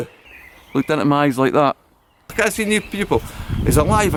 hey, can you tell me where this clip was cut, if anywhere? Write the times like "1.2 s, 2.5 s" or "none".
none